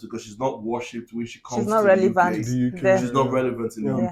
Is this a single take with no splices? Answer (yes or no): yes